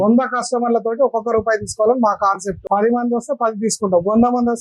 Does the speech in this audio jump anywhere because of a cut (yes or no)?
yes